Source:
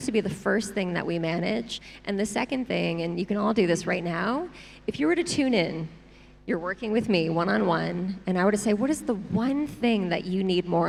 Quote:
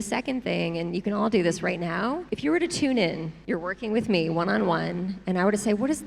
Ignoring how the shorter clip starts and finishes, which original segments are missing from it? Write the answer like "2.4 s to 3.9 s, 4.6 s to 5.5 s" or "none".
4.5 s to 4.8 s, 5.9 s to 6.3 s

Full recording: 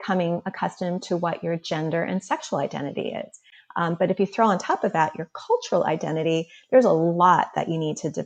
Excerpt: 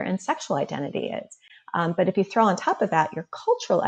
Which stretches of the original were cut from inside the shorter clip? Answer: none

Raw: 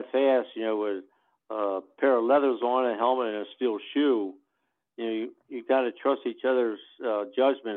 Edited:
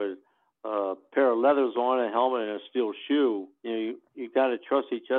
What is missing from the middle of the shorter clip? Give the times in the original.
4.4 s to 4.9 s

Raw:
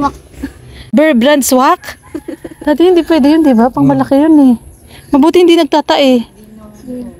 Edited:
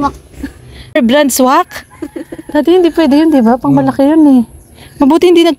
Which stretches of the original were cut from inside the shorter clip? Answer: 0.9 s to 1.1 s

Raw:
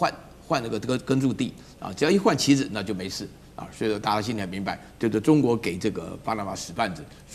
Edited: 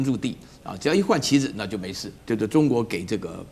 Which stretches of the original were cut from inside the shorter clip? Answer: 3.3 s to 4.8 s

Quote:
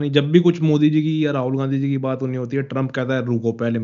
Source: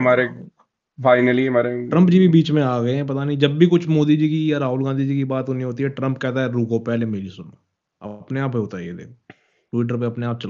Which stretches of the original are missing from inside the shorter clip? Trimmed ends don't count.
none

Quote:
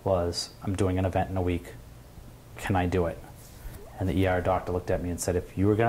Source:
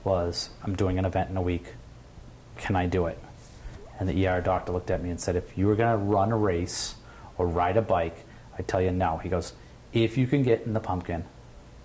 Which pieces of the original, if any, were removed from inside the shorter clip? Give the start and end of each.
none

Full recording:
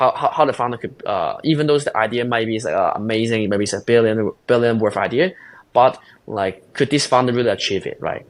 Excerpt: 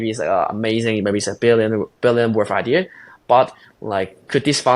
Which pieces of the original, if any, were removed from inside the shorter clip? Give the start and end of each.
none

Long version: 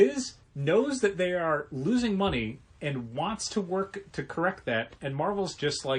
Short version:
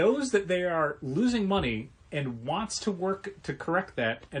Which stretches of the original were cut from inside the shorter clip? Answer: none

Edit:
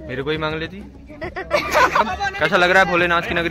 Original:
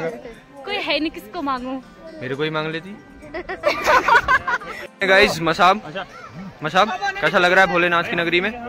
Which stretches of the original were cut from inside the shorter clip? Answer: 4.1 s to 6.8 s

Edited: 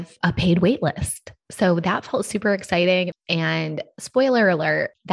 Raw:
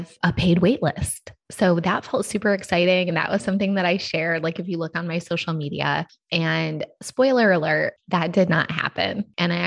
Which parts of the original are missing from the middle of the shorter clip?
3.1 s to 6.1 s

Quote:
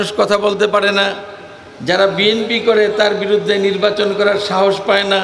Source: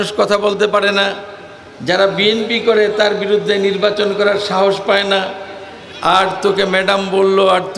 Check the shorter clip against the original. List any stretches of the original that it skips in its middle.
none

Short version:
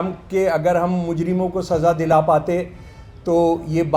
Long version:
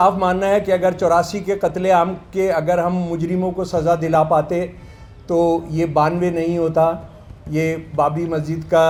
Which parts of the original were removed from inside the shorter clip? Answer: none

